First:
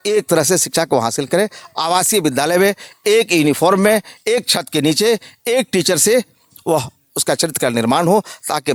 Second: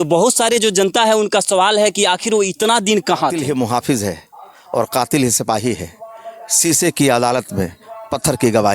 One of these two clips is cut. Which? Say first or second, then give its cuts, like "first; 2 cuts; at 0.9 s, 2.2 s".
second; 1 cut; at 3.4 s